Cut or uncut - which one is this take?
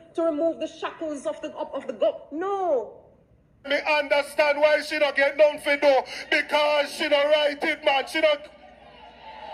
cut